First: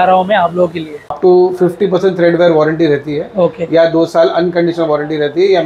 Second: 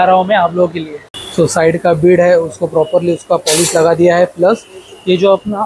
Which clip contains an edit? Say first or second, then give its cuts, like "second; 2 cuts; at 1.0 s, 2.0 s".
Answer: first; 1 cut; at 1.2 s